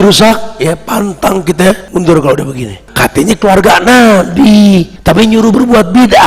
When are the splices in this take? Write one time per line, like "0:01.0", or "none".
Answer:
0:01.8
0:02.9
0:04.9